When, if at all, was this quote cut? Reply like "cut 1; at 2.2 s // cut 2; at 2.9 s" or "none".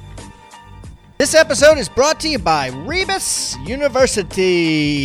cut 1; at 1.0 s